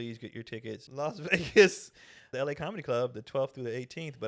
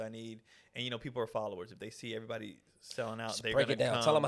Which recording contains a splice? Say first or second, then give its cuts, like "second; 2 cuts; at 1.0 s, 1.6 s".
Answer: first; 2 cuts; at 0.9 s, 2.3 s